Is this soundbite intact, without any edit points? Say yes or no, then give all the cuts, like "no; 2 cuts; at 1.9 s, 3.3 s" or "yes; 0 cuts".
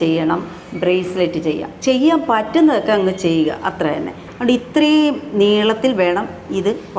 no; 1 cut; at 4.2 s